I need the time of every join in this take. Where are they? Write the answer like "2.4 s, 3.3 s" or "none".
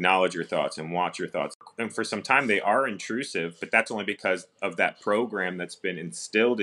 1.6 s